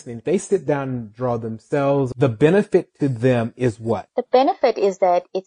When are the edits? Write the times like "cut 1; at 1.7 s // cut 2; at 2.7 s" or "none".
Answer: cut 1; at 2.1 s // cut 2; at 4.1 s